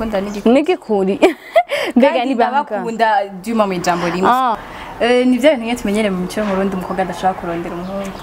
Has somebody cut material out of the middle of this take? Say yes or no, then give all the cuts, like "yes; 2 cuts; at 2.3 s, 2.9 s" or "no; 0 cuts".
yes; 1 cut; at 4.6 s